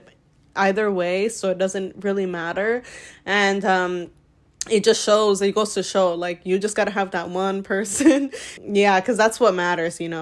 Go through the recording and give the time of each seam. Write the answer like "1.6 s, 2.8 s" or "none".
8.6 s